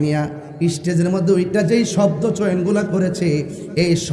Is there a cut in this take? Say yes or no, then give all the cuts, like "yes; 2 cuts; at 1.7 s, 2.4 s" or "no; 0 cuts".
no; 0 cuts